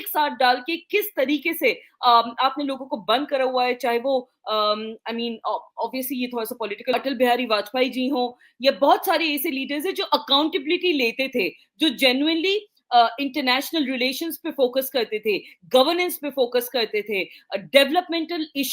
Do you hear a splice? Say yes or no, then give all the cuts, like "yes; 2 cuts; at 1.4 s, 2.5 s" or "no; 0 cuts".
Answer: yes; 1 cut; at 6.9 s